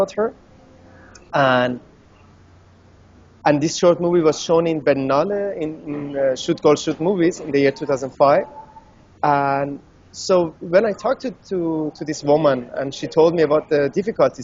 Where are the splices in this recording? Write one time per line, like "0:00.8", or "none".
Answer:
0:05.0